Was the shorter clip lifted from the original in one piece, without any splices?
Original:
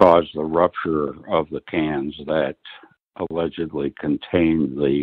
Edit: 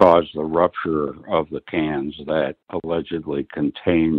no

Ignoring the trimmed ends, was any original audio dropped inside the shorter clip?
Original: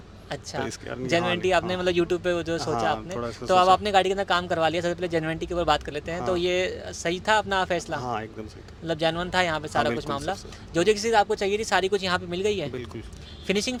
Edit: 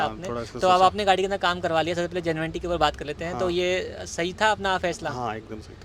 no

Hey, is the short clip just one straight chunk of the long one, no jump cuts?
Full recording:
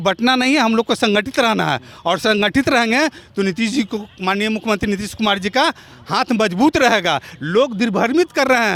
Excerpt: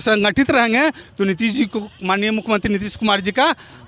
yes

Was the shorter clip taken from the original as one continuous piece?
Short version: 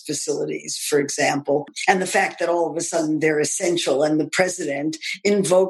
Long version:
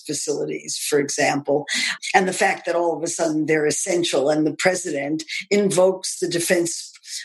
no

